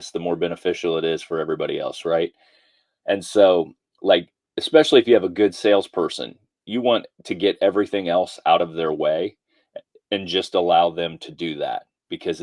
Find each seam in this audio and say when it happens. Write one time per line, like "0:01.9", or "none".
none

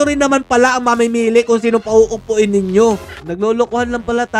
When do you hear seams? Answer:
0:03.2

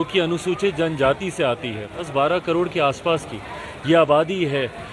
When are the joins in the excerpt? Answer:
0:02.1

